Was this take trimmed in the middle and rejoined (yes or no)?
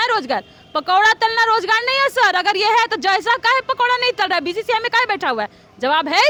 no